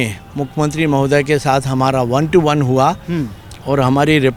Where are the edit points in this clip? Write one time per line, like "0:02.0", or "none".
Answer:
none